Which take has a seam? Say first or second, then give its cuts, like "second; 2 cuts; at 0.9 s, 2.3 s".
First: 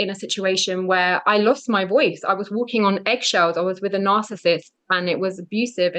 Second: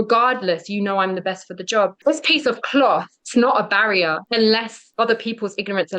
second; 4 cuts; at 2.0 s, 3.2 s, 4.2 s, 4.8 s